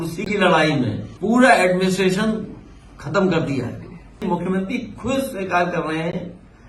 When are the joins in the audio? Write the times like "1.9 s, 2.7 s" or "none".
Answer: 1.1 s, 4.2 s